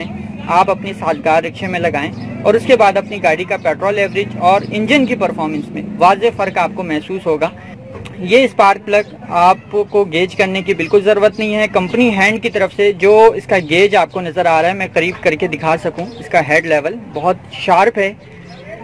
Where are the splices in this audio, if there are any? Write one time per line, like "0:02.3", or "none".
none

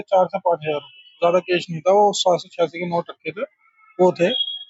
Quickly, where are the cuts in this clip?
none

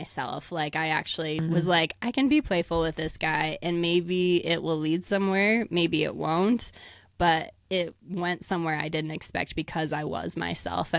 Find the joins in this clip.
0:01.4

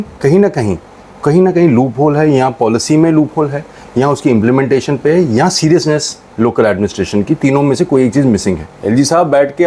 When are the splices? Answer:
0:08.7

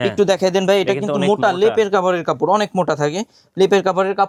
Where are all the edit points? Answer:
none

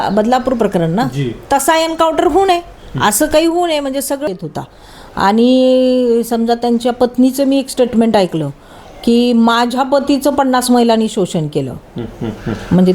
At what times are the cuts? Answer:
0:04.3

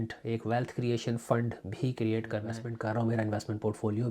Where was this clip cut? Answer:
0:02.6

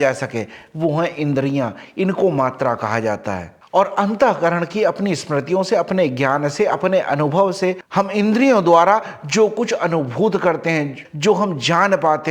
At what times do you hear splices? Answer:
0:03.6

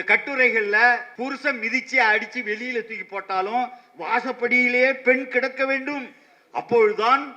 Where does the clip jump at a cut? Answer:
0:01.1

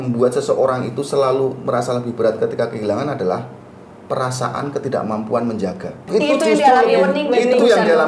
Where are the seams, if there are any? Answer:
0:06.0

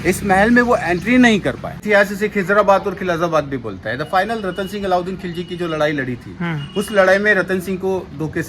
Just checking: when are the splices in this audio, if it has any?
0:01.8

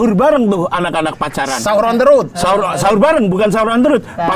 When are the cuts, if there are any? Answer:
none

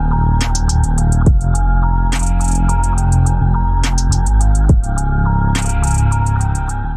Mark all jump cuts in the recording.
none

